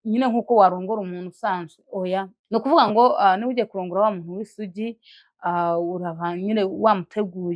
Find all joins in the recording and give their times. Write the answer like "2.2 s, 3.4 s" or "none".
2.4 s